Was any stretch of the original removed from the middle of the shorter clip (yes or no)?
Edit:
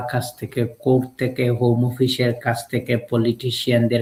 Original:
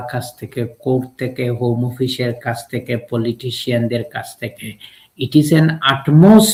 no